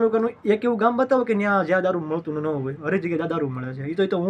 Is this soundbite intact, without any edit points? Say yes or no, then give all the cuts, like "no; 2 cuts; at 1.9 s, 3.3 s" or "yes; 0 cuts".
yes; 0 cuts